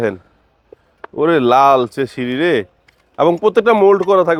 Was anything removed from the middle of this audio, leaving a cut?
no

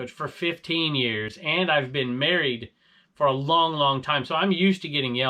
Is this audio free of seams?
yes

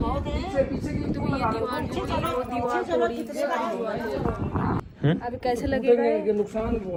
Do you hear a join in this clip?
no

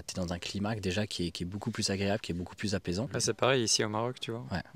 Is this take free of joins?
yes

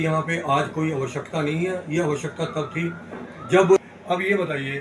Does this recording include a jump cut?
yes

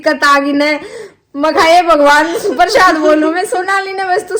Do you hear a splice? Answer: no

